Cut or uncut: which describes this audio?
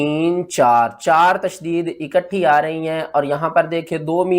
uncut